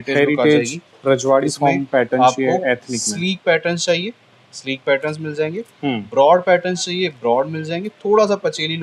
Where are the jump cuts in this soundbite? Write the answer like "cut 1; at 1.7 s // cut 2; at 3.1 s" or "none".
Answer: none